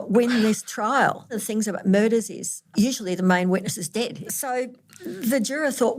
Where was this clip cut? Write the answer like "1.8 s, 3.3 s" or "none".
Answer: 1.4 s, 2.6 s, 4.1 s